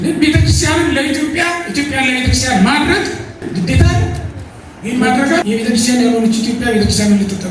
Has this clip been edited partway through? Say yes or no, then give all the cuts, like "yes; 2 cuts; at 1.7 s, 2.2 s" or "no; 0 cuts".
yes; 1 cut; at 5.4 s